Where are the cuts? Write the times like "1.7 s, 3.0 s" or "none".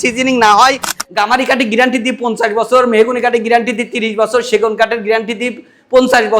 1.0 s